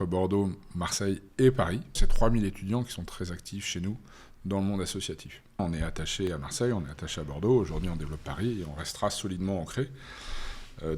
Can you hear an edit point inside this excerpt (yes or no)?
yes